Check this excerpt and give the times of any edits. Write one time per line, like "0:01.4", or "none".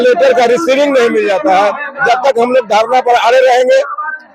none